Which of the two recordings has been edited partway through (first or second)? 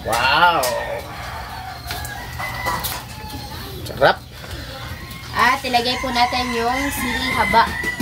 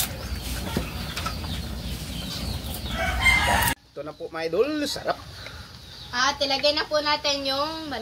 second